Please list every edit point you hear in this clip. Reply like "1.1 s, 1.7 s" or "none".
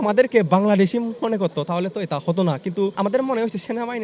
1.1 s, 2.9 s